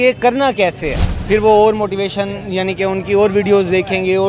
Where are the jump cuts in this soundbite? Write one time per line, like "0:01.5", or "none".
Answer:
0:01.0